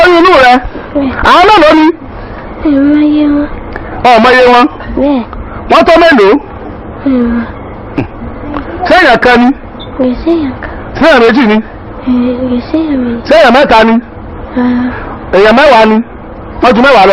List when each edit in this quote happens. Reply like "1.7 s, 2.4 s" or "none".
none